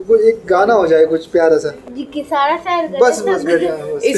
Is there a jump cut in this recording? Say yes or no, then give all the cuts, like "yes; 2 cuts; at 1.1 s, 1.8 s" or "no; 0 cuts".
no; 0 cuts